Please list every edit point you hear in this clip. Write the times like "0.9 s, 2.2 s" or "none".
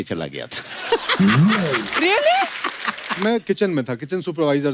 3.2 s